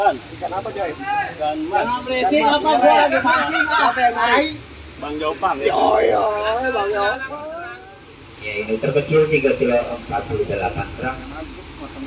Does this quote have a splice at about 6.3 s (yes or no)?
no